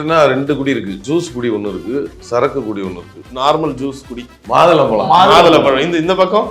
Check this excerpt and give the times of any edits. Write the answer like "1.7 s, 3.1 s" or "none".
1.0 s, 2.2 s, 3.2 s, 4.4 s